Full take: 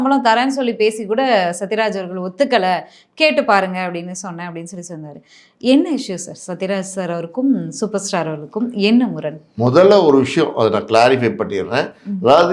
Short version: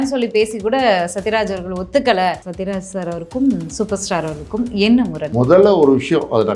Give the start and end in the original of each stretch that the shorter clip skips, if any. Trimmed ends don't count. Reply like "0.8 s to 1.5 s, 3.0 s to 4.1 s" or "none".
3.0 s to 6.5 s, 9.2 s to 9.5 s